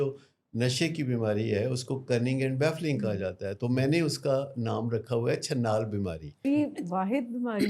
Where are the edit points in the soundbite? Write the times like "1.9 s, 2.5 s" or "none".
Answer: 6.3 s